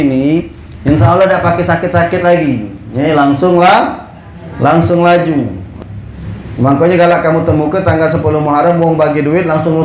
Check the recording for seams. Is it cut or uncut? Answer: cut